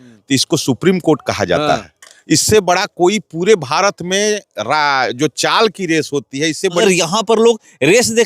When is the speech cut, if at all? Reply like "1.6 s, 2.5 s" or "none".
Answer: 6.8 s